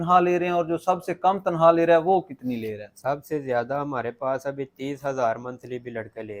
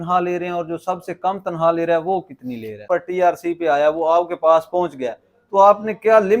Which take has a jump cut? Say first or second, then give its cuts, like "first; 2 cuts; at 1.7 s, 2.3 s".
second; 1 cut; at 2.8 s